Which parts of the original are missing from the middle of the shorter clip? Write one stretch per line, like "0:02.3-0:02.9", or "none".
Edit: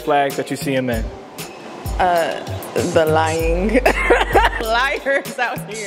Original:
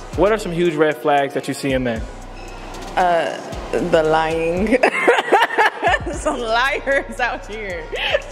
0:05.5-0:06.4